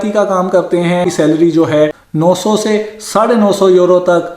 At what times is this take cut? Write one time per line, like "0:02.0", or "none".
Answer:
0:01.1